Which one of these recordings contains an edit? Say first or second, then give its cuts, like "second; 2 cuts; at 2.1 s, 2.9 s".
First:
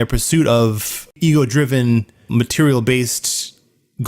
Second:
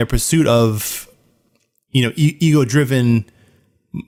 first; 2 cuts; at 1.2 s, 2.3 s